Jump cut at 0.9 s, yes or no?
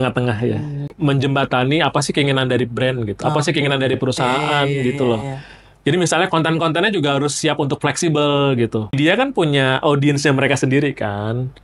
yes